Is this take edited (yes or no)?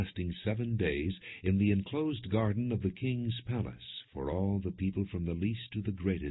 yes